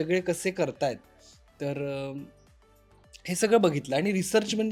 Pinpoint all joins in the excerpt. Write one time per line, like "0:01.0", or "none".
none